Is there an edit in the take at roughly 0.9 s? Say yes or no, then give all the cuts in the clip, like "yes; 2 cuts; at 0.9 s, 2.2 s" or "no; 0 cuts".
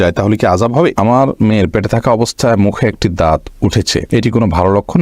yes; 2 cuts; at 0.9 s, 4.0 s